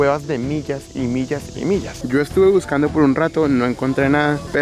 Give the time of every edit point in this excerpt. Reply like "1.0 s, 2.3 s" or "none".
2.0 s